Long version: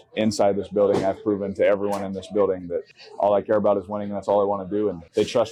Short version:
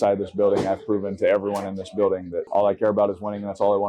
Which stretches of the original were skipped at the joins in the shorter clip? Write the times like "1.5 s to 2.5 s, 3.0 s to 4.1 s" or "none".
2.7 s to 3.0 s